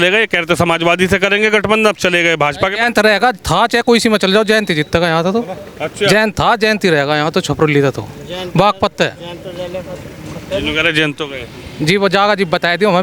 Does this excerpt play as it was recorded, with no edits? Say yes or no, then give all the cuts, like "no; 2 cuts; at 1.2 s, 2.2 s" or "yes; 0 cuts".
yes; 0 cuts